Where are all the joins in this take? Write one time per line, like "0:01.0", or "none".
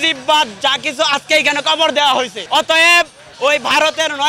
0:02.4